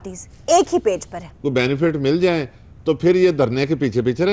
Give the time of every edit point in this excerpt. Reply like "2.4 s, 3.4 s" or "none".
1.2 s